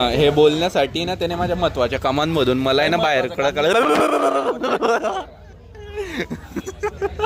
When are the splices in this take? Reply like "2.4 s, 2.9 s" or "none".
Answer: none